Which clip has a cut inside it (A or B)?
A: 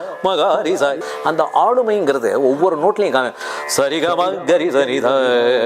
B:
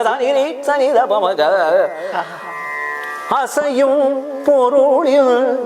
A